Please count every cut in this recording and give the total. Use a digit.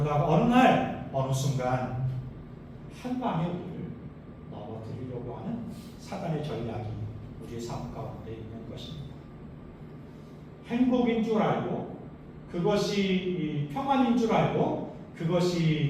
1